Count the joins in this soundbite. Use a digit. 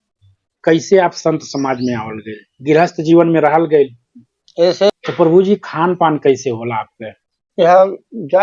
1